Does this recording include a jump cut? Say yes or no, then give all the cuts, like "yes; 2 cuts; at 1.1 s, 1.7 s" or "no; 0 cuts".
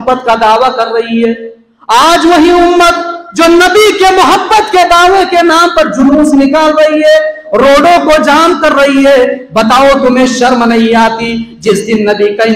no; 0 cuts